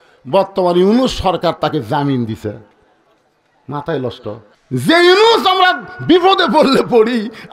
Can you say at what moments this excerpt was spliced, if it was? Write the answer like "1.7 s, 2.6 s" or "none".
4.5 s